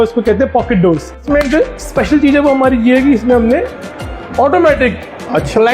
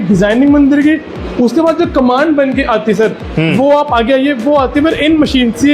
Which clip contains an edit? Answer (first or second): first